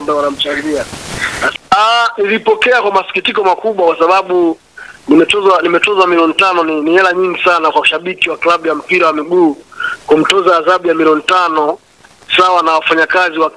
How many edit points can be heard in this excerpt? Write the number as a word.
one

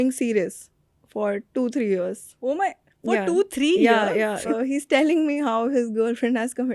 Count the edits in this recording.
one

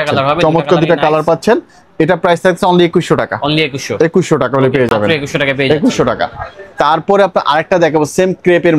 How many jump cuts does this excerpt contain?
zero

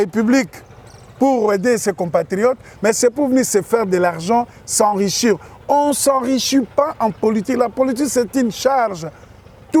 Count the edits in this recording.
zero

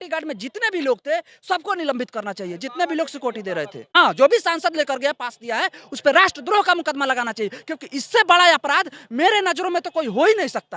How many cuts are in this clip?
one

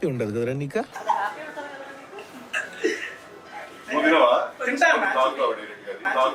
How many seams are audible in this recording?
zero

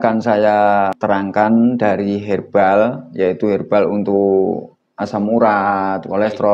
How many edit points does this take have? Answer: one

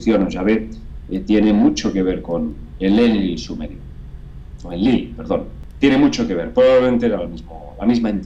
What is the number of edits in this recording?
one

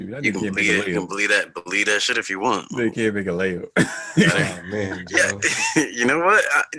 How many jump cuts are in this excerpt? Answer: zero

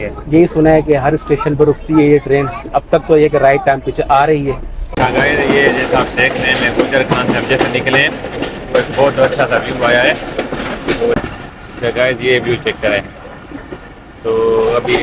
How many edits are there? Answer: two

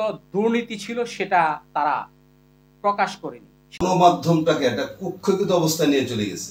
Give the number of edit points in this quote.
one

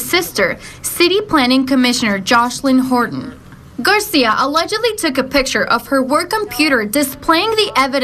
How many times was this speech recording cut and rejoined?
two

